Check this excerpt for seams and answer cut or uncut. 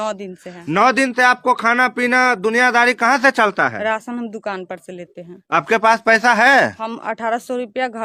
uncut